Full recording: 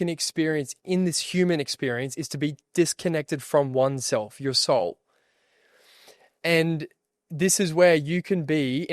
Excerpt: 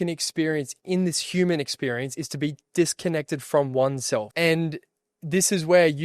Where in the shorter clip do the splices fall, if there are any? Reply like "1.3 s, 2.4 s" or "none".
4.3 s